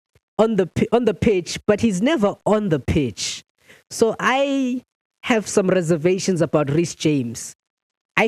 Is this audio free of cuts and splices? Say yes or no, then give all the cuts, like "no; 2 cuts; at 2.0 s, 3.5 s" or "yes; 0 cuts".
yes; 0 cuts